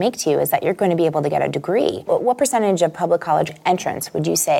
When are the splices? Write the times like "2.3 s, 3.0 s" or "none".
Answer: 2.1 s, 3.5 s